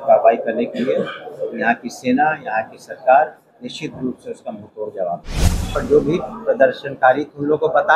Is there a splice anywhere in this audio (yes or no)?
yes